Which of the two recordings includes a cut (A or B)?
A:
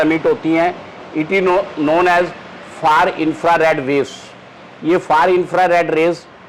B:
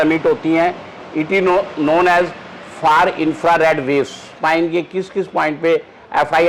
B